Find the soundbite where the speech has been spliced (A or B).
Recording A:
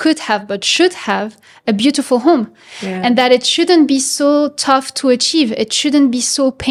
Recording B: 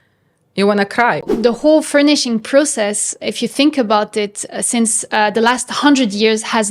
B